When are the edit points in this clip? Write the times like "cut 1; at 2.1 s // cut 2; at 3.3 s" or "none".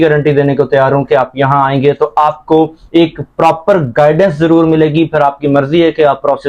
none